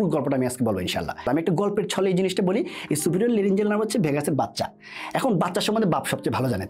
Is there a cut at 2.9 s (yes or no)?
no